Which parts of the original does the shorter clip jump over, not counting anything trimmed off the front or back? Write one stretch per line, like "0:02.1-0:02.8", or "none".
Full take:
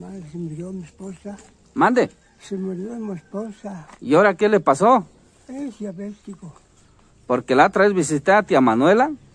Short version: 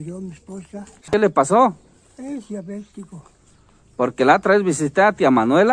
0:01.6-0:04.4